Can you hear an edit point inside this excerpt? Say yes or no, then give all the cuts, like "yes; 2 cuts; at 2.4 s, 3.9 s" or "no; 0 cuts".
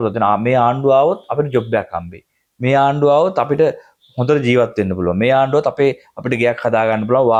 no; 0 cuts